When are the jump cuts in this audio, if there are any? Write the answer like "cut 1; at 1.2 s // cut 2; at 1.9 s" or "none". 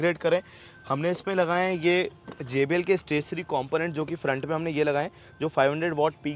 none